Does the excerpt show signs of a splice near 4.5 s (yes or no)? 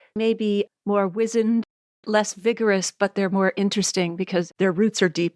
yes